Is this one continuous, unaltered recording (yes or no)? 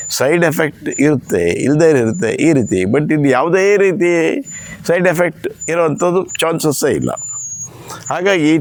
yes